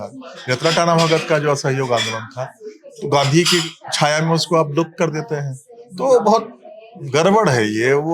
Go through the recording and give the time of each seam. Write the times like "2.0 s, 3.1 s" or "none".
none